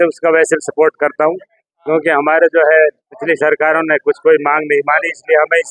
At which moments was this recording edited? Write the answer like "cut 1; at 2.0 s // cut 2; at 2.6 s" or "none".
none